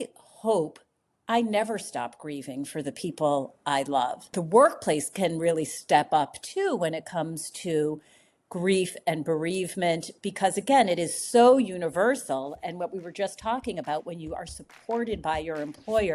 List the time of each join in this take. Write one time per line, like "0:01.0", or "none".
0:04.3

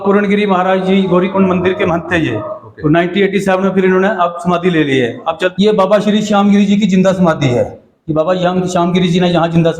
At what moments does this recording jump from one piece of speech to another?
0:05.5

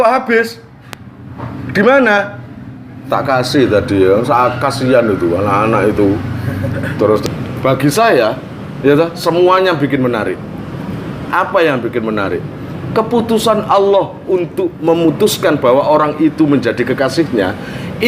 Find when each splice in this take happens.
0:07.2

